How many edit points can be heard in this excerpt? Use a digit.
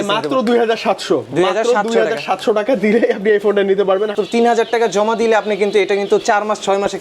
1